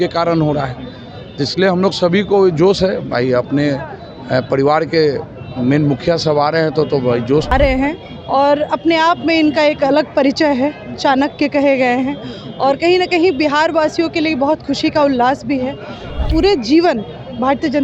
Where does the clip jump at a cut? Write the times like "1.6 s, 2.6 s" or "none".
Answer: 7.5 s, 16.2 s